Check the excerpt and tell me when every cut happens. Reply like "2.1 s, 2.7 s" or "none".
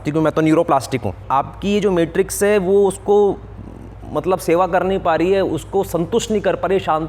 1.2 s

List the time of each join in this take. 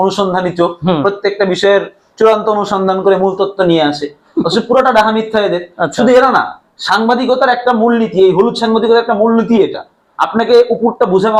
none

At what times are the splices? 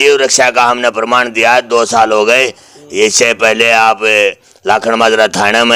none

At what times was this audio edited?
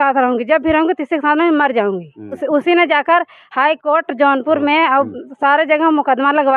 2.4 s

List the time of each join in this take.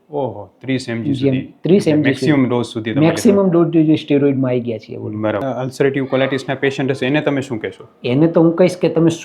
5.5 s

